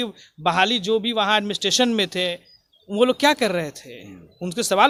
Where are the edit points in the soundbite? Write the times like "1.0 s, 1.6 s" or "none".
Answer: none